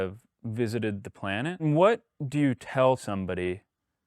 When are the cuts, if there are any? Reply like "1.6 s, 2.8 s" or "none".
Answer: 1.6 s, 3.0 s